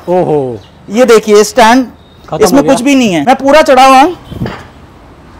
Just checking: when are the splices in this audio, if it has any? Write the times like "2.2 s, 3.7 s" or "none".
3.2 s